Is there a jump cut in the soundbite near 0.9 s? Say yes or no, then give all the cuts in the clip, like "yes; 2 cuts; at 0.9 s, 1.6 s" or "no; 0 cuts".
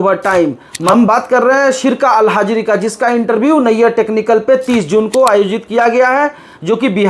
yes; 1 cut; at 0.9 s